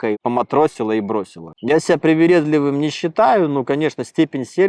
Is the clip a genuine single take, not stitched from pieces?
no; 1 cut; at 1.4 s

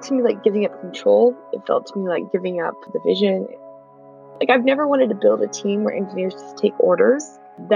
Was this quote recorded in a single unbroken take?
no; 1 cut; at 3.9 s

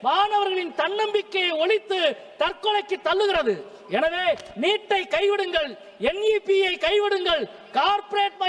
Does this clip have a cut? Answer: no; 0 cuts

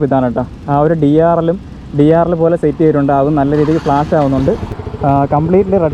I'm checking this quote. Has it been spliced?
yes; 1 cut; at 4.7 s

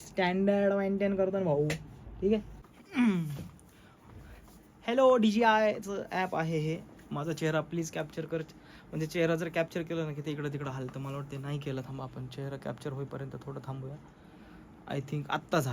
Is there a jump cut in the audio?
yes; 1 cut; at 2.6 s

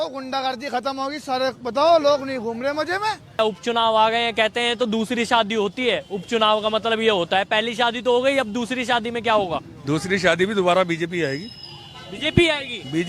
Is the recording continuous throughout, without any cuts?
no; 1 cut; at 3.4 s

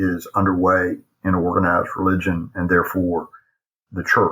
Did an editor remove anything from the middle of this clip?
no; 0 cuts

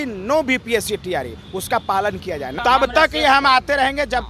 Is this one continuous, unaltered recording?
no; 1 cut; at 2.5 s

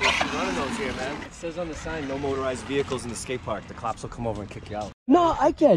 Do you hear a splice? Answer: yes; 2 cuts; at 1.3 s, 4.8 s

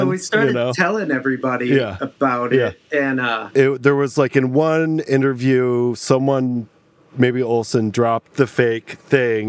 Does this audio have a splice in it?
yes; 2 cuts; at 3.4 s, 8.3 s

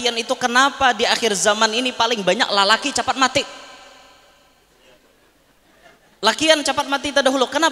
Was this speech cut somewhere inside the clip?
no; 0 cuts

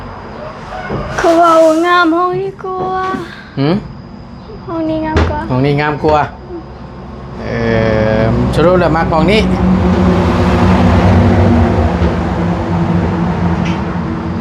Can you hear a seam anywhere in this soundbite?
no; 0 cuts

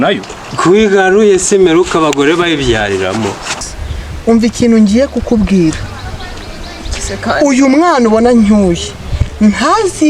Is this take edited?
yes; 1 cut; at 3.7 s

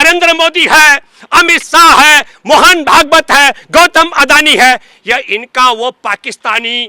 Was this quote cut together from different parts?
no; 0 cuts

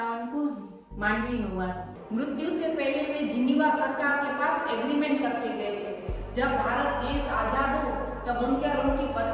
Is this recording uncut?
no; 1 cut; at 1.9 s

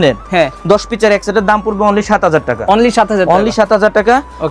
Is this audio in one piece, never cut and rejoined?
yes; 0 cuts

